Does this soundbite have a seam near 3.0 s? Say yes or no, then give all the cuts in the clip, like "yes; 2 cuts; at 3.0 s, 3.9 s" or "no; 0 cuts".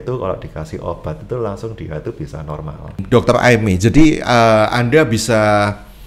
yes; 1 cut; at 3.0 s